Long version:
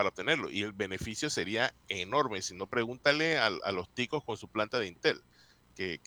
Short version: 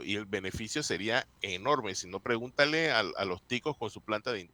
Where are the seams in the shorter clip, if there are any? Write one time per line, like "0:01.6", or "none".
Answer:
none